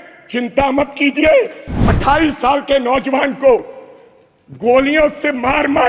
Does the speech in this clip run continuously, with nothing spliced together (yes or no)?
no